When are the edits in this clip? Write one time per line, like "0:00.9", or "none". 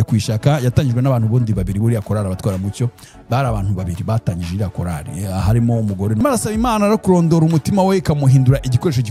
0:06.2